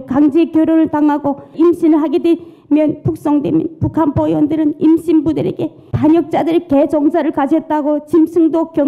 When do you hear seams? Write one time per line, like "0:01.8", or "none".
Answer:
0:01.5